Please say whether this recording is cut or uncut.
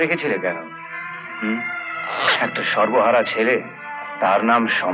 uncut